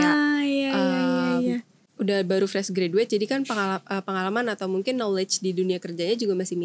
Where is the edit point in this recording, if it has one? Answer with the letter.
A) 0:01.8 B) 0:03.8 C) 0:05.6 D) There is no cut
A